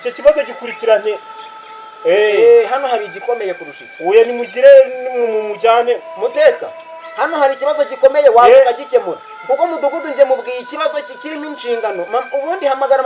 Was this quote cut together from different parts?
no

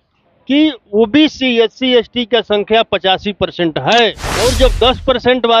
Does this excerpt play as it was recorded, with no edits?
no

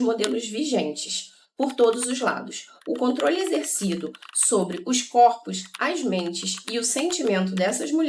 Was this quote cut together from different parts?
no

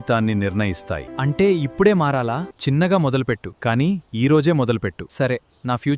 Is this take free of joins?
no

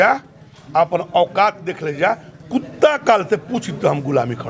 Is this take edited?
no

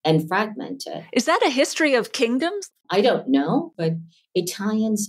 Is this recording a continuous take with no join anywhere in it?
no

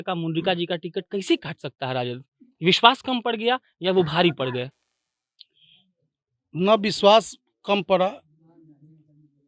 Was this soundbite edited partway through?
no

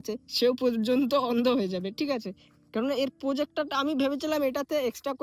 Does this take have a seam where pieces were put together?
no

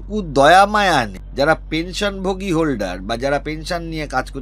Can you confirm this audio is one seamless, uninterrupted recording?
no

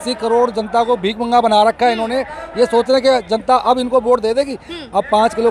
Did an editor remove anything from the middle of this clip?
no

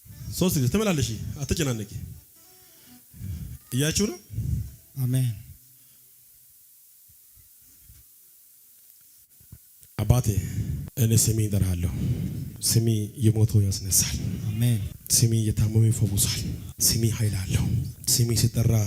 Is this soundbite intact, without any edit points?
no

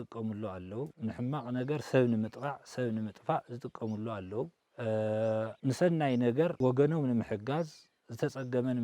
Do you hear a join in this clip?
yes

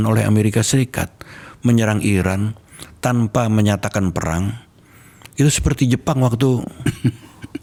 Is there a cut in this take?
no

